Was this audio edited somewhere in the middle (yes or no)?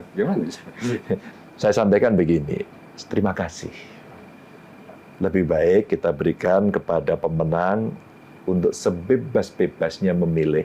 yes